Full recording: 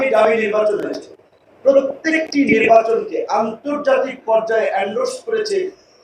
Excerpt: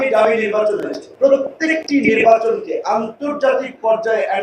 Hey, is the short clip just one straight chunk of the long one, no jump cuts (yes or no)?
no